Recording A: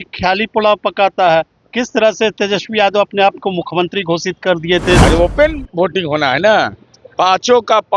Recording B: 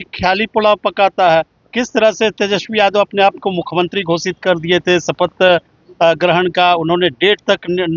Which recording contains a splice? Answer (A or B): A